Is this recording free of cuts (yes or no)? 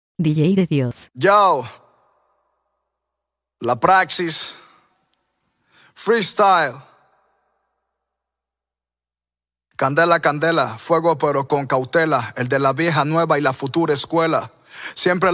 no